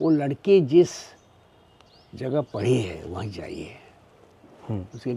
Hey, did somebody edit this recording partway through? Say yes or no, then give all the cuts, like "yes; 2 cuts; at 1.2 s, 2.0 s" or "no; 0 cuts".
no; 0 cuts